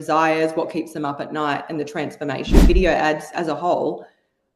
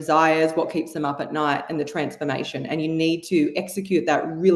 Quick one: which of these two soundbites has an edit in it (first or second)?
first